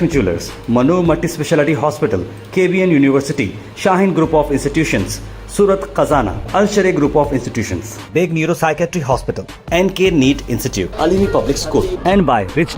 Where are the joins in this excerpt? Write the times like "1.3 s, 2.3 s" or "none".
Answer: none